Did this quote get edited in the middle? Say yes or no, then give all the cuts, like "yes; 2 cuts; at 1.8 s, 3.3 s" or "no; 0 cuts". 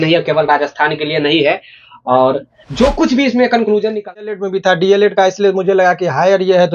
yes; 1 cut; at 4.3 s